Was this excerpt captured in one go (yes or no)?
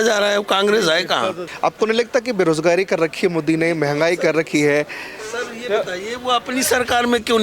no